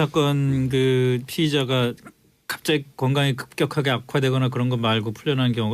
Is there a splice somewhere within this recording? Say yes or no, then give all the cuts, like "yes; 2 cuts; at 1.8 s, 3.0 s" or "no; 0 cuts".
yes; 1 cut; at 4.5 s